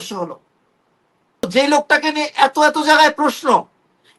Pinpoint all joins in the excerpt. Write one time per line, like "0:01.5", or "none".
0:01.5

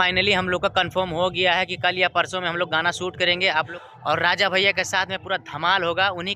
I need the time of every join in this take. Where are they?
0:03.8

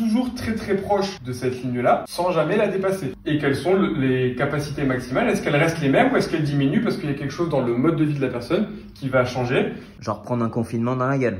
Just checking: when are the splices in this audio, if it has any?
0:01.2
0:02.1
0:03.1
0:09.9

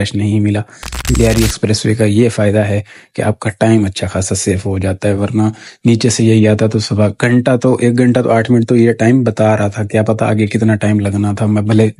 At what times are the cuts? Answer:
0:00.9

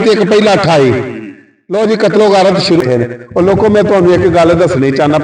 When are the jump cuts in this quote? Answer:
0:02.8

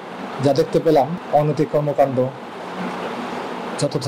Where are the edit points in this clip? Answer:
0:01.2

